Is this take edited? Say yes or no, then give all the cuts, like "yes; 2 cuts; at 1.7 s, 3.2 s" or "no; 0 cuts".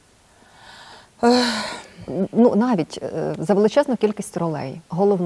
no; 0 cuts